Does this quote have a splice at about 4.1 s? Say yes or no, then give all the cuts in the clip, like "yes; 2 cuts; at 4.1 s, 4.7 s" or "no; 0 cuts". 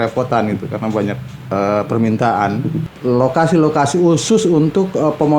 no; 1 cut; at 2.8 s